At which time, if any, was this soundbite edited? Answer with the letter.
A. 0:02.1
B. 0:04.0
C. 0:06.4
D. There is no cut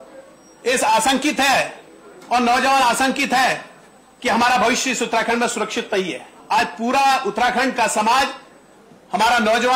C